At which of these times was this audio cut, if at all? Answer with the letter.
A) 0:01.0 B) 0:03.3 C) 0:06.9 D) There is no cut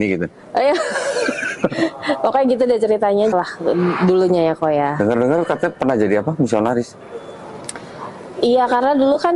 B